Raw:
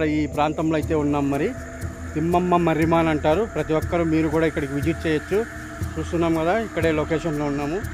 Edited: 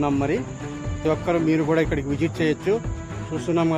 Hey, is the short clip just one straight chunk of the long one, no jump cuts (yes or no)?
no